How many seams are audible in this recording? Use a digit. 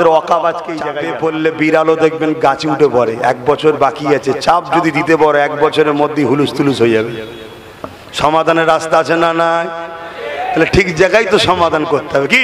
1